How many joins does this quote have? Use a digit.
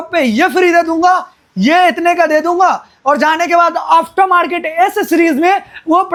0